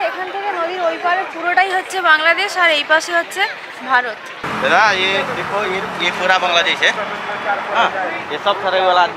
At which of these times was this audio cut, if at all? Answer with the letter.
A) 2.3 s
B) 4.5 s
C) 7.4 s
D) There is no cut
B